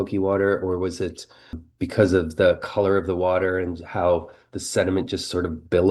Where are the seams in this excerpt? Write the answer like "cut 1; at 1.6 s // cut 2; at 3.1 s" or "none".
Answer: cut 1; at 1.7 s